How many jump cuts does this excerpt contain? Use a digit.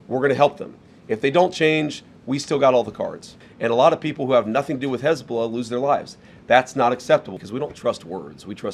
2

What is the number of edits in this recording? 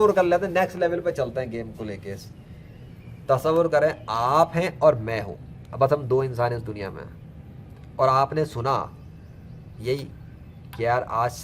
0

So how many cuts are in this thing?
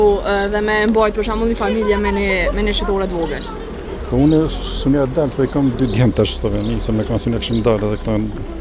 0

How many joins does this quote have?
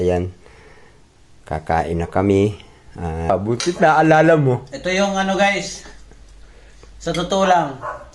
1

